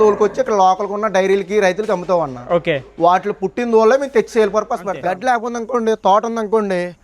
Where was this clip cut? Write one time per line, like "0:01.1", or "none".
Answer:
0:04.9